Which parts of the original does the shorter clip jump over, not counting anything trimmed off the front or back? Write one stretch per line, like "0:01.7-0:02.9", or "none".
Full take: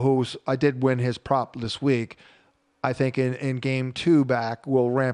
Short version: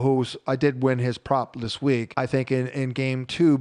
0:02.1-0:02.7